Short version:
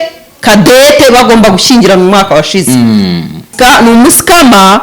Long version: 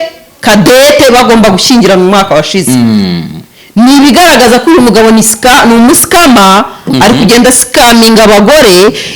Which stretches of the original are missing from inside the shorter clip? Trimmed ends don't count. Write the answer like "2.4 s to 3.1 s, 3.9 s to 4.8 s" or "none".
3.5 s to 5.3 s